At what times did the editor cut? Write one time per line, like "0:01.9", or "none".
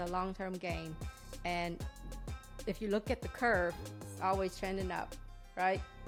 none

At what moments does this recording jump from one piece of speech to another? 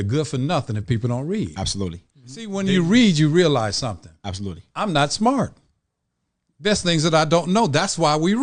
0:02.5

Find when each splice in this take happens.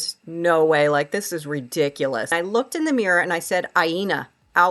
0:02.3

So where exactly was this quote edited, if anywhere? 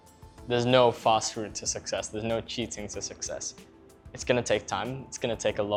none

